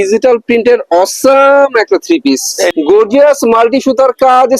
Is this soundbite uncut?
no; 1 cut; at 2.7 s

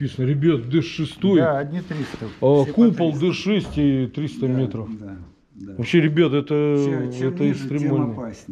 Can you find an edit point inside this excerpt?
no; 0 cuts

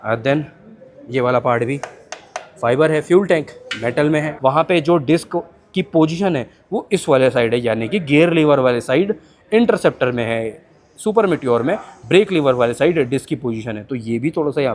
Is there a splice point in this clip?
yes; 1 cut; at 4.3 s

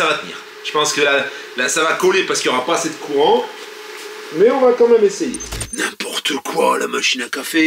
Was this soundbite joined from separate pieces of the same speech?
yes; 1 cut; at 5.5 s

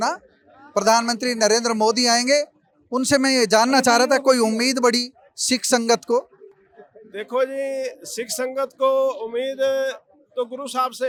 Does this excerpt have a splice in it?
no; 0 cuts

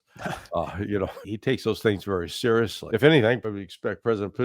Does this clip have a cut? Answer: yes; 3 cuts; at 1.3 s, 2.8 s, 3.4 s

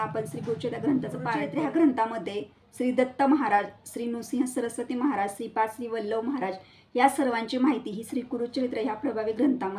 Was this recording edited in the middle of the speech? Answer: yes; 1 cut; at 1.4 s

